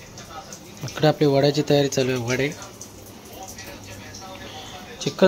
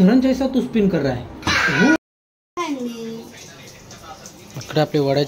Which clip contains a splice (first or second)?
second